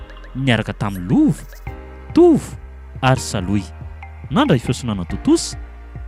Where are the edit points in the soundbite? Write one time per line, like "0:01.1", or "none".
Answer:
none